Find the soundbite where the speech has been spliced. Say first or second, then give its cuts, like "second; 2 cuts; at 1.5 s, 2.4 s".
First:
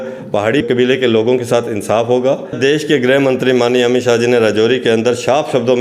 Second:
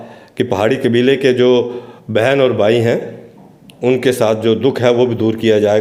first; 1 cut; at 2.5 s